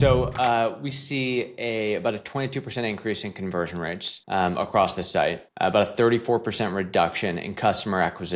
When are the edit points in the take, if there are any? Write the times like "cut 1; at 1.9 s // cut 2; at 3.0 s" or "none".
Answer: cut 1; at 4.1 s // cut 2; at 5.5 s